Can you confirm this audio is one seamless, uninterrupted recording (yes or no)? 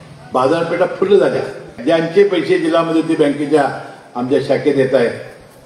no